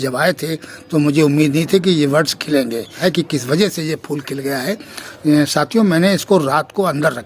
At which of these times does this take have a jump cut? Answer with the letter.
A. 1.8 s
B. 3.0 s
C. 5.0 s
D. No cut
B